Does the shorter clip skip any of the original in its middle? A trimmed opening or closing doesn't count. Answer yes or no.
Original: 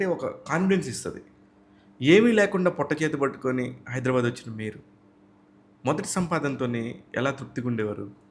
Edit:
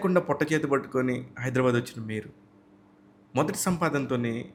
no